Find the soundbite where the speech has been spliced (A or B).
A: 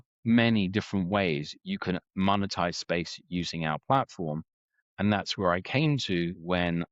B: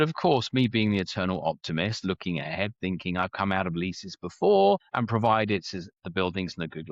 B